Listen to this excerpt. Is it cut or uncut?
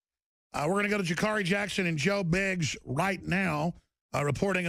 uncut